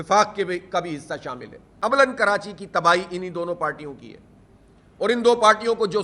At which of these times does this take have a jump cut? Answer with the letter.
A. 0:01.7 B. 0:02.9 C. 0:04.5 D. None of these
A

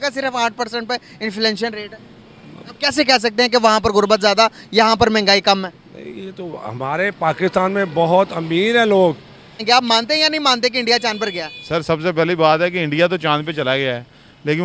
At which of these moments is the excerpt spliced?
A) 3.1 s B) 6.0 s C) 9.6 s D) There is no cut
C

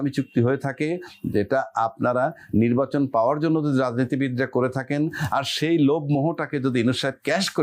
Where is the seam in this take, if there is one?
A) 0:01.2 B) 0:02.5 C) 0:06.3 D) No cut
D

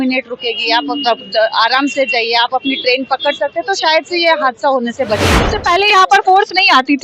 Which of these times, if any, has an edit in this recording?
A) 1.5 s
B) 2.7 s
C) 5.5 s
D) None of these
C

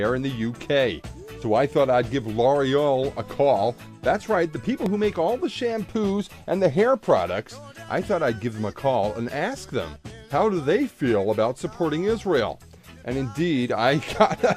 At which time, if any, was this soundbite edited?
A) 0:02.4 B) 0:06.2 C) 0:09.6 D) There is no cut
C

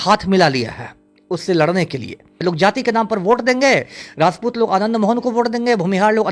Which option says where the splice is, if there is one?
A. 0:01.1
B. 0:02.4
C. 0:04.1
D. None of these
B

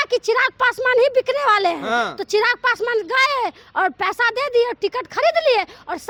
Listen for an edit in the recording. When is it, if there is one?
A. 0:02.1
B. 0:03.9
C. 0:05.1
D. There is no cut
D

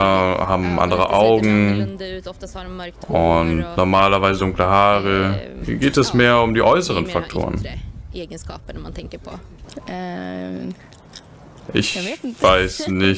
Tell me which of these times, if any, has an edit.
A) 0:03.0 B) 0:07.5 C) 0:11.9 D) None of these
B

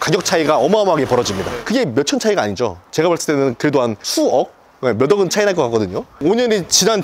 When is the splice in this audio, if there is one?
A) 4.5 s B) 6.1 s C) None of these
B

